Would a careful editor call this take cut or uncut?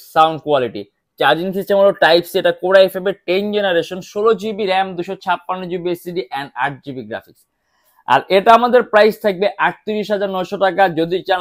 uncut